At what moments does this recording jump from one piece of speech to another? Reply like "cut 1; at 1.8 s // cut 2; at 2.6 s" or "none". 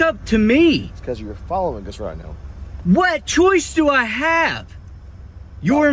none